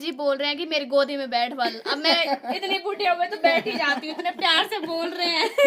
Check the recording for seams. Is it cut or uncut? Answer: uncut